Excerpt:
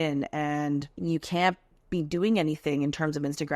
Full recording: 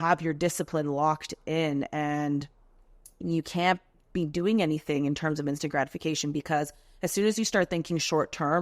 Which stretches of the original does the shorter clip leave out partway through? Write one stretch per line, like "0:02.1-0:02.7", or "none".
0:02.5-0:03.2